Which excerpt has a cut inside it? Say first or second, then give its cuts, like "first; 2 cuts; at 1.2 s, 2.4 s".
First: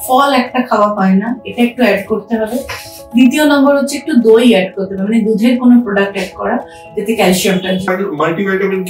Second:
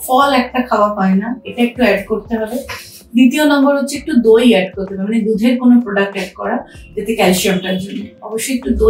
first; 1 cut; at 7.9 s